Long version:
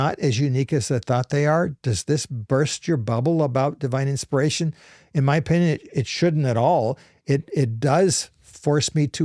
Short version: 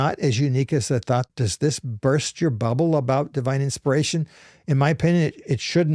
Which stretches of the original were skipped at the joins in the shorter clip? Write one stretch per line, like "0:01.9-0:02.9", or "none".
0:01.3-0:01.7